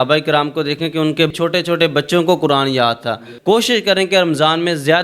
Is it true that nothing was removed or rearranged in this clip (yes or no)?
no